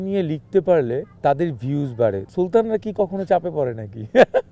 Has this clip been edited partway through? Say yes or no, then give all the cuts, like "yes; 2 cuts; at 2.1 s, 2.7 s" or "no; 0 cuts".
yes; 2 cuts; at 1.2 s, 2.2 s